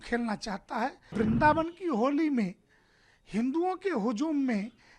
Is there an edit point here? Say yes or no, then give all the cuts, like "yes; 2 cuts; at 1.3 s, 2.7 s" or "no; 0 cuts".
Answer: yes; 1 cut; at 1.1 s